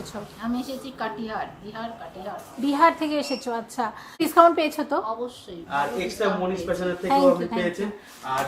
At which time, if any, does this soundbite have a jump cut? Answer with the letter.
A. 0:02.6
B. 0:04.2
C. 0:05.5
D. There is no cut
B